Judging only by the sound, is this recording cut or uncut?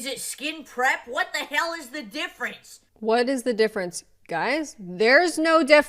cut